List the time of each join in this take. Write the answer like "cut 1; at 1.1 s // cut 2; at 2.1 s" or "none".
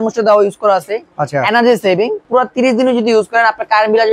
cut 1; at 2.2 s